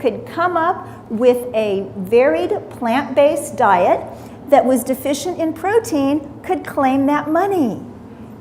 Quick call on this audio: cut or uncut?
cut